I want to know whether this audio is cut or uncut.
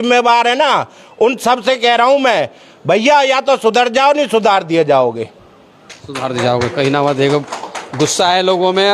uncut